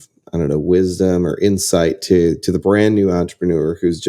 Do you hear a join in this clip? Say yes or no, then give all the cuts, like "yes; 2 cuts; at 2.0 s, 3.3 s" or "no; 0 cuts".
no; 0 cuts